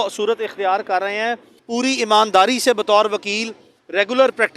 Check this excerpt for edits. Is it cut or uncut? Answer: cut